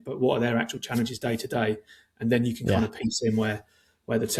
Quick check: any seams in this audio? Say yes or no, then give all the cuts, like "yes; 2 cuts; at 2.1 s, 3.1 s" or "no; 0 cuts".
no; 0 cuts